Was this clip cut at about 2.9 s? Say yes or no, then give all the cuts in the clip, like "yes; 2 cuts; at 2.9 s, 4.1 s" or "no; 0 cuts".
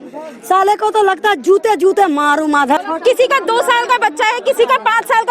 yes; 1 cut; at 2.9 s